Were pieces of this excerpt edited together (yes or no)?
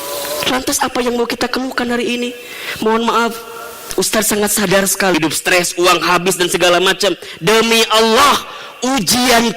yes